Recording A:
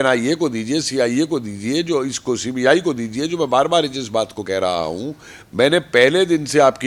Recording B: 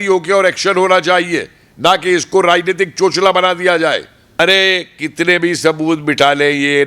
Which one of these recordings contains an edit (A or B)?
B